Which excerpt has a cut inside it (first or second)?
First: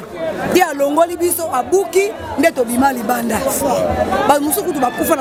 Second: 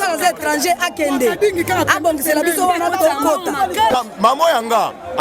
second